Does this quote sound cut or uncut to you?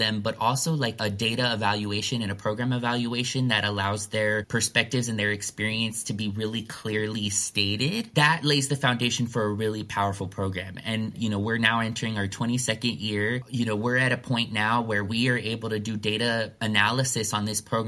cut